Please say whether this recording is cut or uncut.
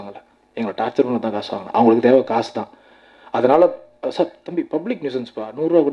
uncut